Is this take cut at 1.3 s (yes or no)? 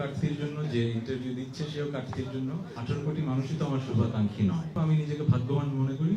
no